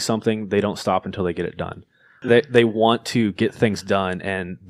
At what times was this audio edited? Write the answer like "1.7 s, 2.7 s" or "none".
2.2 s